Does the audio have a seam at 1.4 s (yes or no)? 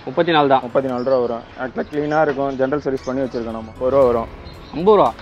no